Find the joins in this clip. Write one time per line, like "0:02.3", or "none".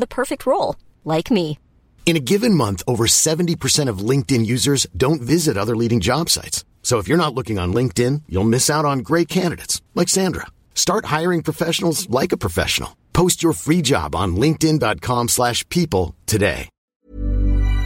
0:16.8